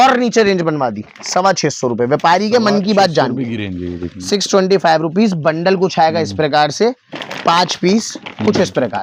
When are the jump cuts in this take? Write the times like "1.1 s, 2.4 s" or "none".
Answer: none